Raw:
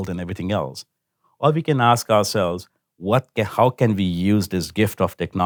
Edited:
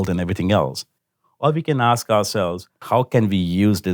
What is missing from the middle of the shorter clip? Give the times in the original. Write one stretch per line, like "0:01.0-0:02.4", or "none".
0:02.8-0:03.5